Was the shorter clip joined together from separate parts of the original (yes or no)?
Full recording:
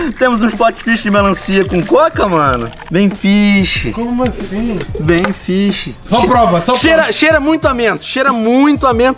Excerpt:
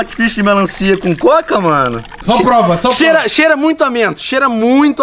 yes